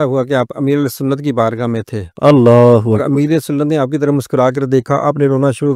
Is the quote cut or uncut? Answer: uncut